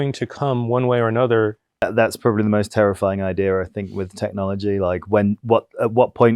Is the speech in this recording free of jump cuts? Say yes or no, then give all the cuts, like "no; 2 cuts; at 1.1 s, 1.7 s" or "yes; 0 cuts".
no; 1 cut; at 1.8 s